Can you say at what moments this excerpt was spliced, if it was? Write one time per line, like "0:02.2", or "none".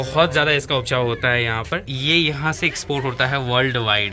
0:01.9